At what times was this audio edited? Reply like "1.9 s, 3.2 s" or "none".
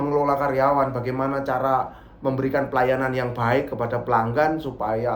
none